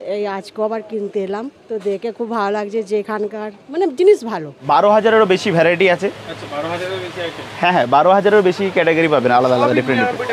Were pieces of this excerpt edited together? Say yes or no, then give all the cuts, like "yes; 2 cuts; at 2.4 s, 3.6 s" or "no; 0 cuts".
yes; 2 cuts; at 1.5 s, 4.5 s